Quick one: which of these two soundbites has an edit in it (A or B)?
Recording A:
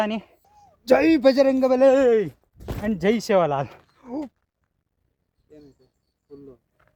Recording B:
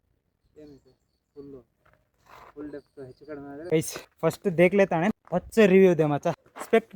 B